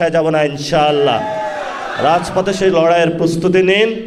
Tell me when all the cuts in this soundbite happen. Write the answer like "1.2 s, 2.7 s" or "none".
none